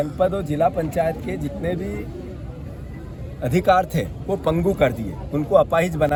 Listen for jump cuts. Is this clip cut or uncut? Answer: uncut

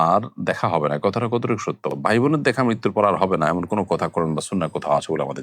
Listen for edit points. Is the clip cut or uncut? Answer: uncut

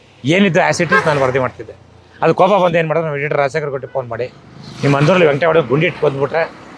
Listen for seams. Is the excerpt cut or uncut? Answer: uncut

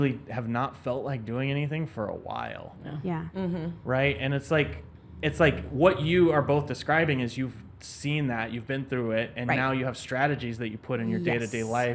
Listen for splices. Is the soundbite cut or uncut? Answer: uncut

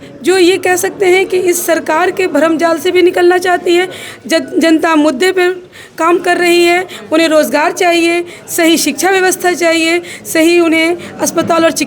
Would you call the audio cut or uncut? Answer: uncut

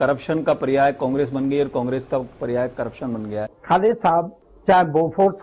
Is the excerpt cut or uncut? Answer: cut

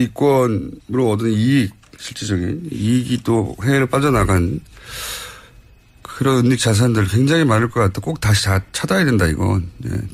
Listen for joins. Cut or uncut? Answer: cut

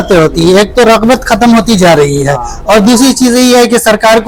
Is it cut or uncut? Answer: uncut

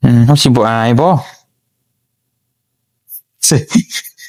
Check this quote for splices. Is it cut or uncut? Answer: uncut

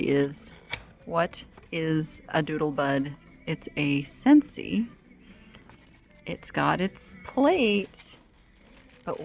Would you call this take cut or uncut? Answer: uncut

